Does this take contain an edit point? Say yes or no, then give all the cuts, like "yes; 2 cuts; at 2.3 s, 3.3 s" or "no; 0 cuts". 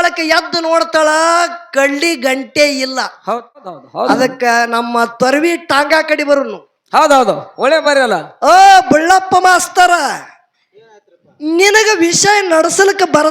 yes; 1 cut; at 3.7 s